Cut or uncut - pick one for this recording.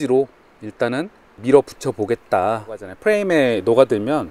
cut